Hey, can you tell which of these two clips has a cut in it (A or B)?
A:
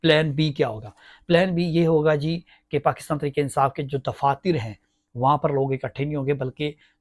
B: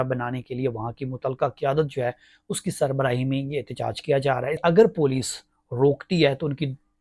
B